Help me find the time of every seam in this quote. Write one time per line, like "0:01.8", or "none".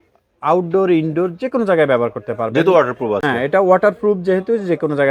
none